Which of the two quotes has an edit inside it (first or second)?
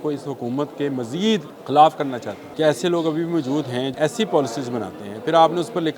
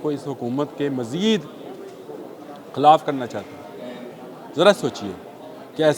first